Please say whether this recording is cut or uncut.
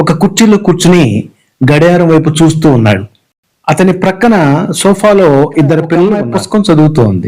cut